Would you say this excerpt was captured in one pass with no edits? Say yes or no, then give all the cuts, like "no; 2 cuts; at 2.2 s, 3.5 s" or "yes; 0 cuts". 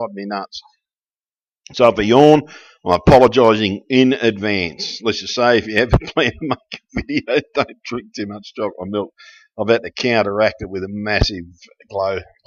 yes; 0 cuts